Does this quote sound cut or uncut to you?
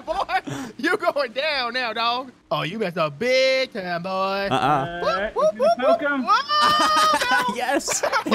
cut